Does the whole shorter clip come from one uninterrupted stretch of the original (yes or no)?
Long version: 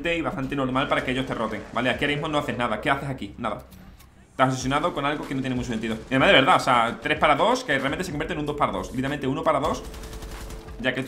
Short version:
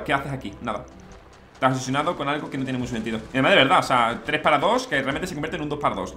yes